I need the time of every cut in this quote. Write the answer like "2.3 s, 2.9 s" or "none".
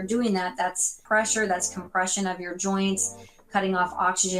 1.0 s